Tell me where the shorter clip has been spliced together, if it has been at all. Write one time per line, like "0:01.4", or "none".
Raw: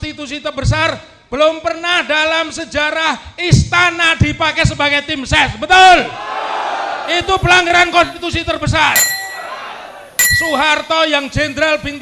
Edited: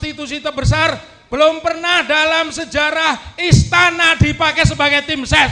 none